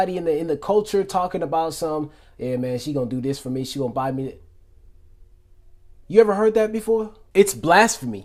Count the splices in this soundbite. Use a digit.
0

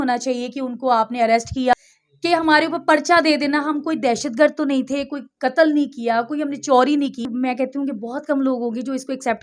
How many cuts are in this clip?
2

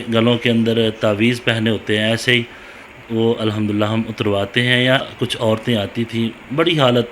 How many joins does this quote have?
1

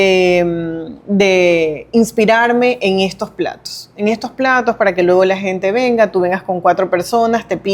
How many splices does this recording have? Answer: 0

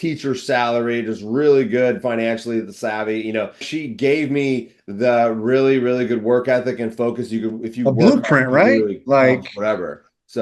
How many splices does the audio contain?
1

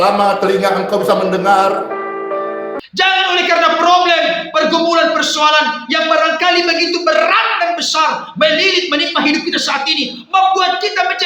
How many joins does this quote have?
1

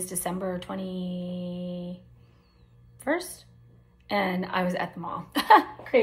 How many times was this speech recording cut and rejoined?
0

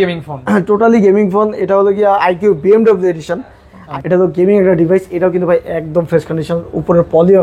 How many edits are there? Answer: 1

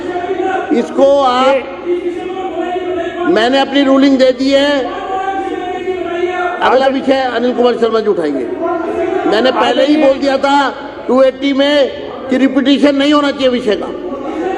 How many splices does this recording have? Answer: 0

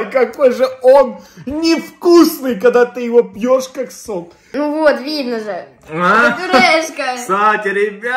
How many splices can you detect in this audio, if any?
1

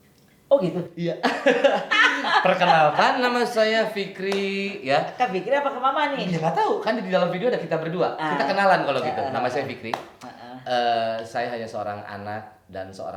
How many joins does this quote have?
0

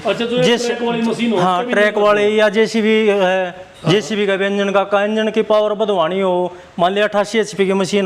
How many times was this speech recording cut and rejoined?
1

